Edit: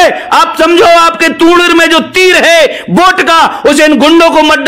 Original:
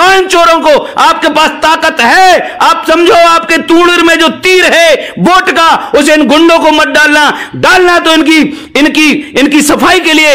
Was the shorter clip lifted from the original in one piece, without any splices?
yes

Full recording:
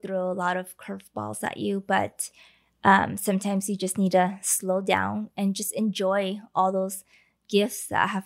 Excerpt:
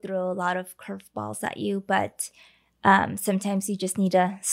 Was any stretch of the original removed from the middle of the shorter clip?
no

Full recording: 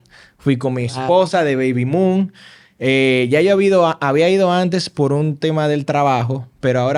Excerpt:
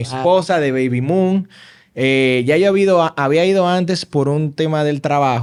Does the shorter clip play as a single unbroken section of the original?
yes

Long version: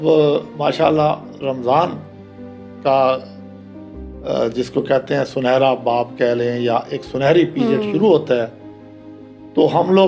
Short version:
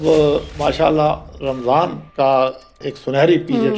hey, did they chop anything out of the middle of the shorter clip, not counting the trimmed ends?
yes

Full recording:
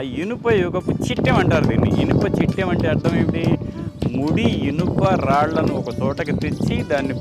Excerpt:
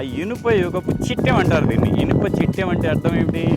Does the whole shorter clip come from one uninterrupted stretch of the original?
yes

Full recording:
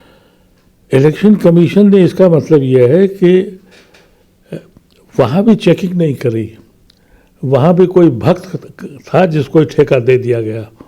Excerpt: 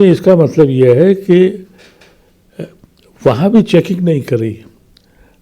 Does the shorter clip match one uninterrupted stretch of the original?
yes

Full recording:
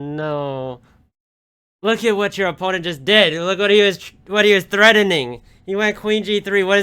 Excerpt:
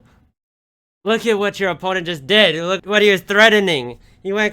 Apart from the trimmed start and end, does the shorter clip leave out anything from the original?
yes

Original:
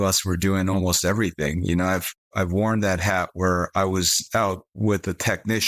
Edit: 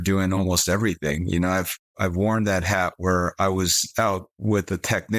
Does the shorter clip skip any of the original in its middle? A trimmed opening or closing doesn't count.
no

